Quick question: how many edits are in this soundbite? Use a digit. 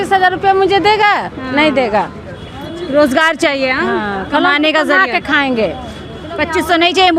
0